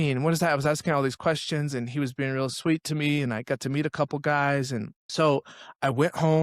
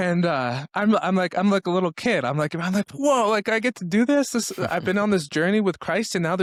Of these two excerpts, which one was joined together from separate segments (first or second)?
first